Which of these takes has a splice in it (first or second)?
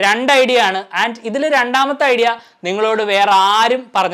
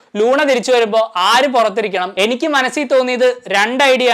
second